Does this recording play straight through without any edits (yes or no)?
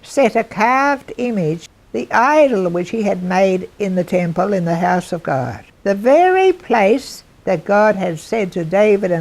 no